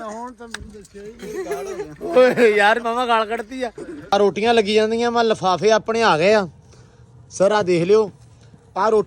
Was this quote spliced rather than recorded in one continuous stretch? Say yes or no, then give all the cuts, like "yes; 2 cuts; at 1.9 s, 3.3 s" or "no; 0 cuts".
yes; 1 cut; at 4.1 s